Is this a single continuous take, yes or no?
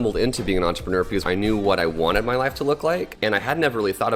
no